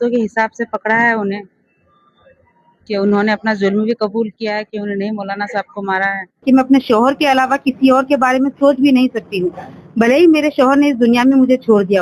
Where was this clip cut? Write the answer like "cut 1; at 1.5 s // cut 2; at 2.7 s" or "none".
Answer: cut 1; at 6.4 s

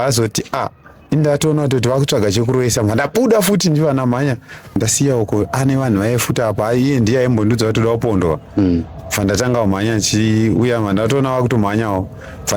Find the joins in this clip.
cut 1; at 4.8 s

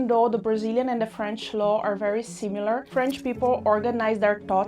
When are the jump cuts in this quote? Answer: cut 1; at 2.9 s

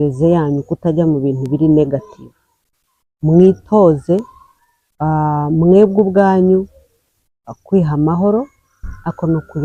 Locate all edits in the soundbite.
none

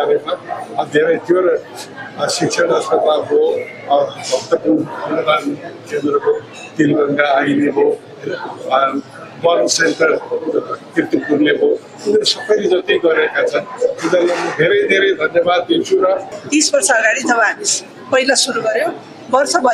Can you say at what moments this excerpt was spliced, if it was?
cut 1; at 16.3 s

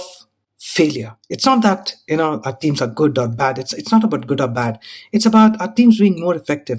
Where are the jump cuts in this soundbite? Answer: cut 1; at 1.1 s

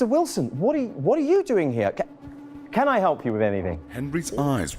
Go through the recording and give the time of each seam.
none

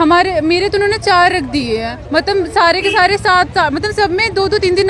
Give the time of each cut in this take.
none

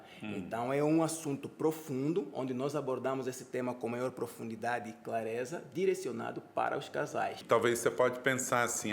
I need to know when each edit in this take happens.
cut 1; at 7.4 s

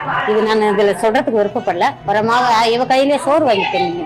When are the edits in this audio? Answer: cut 1; at 2.0 s

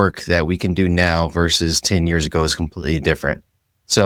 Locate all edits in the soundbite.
none

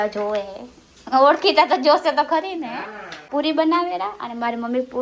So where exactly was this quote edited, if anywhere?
cut 1; at 3.1 s

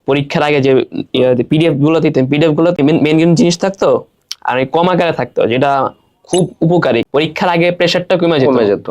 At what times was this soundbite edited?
cut 1; at 2.8 s // cut 2; at 7.1 s

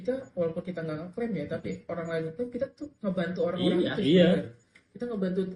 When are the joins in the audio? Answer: none

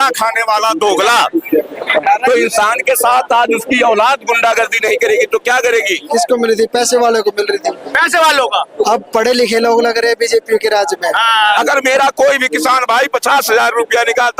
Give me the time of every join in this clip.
cut 1; at 6.0 s // cut 2; at 11.6 s

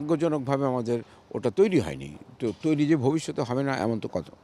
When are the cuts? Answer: none

